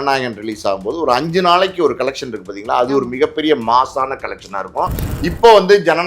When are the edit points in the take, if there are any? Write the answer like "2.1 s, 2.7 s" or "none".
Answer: 5.0 s